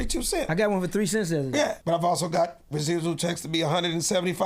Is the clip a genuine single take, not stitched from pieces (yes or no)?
no